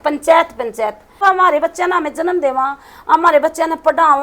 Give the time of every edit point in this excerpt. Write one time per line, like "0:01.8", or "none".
0:01.2